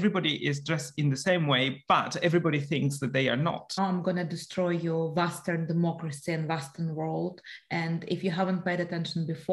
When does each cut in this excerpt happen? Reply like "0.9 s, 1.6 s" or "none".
3.8 s